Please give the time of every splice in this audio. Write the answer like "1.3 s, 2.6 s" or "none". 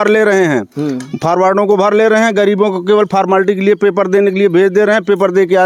none